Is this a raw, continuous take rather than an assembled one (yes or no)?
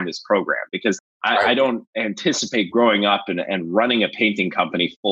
no